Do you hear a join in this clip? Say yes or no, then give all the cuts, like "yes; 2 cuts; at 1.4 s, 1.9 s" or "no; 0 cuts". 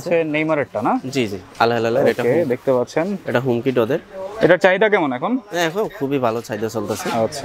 no; 0 cuts